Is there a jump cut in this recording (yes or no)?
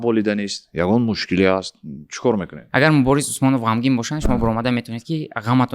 yes